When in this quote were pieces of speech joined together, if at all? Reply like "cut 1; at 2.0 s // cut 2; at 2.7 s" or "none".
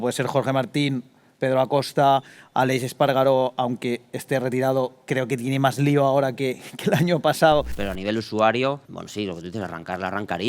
cut 1; at 7.8 s // cut 2; at 8.9 s